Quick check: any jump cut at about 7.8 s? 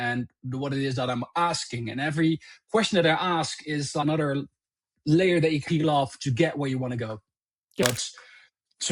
yes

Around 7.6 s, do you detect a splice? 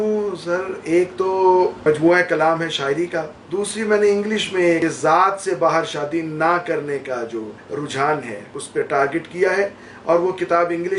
yes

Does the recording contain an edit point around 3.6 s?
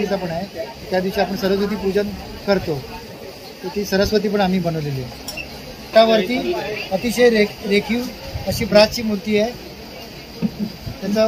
no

